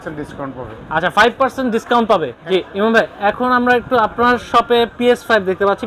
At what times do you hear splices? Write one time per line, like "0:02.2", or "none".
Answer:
0:02.4